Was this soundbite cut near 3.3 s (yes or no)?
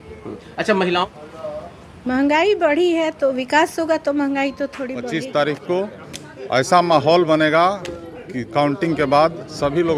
no